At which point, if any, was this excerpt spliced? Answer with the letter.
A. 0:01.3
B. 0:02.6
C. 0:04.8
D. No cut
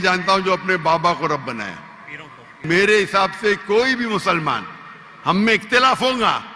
B